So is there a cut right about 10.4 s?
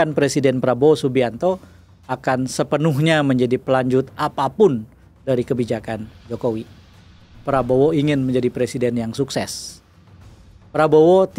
no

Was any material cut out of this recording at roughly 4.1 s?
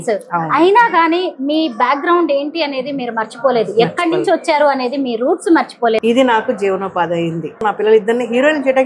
no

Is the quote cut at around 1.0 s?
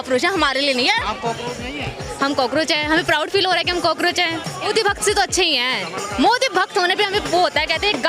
yes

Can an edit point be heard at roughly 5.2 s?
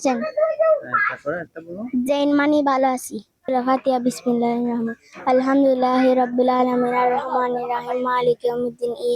no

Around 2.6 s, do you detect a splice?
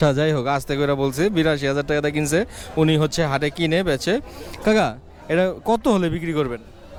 no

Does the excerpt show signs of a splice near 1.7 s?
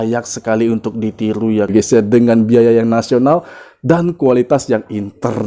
yes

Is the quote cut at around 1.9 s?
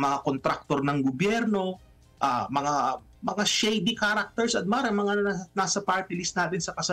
no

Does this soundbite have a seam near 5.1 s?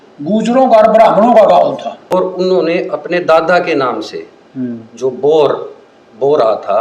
no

